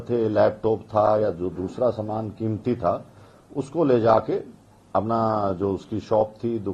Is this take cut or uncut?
uncut